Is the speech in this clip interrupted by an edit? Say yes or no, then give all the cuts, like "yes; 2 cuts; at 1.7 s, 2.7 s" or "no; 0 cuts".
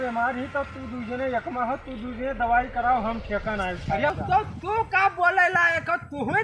yes; 1 cut; at 4.1 s